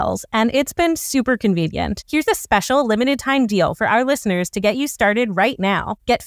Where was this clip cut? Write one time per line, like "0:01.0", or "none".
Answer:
0:02.0